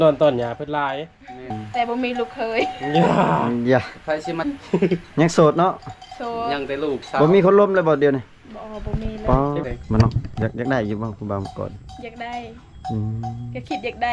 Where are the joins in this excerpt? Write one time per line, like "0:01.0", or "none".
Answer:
0:01.6
0:04.4
0:09.6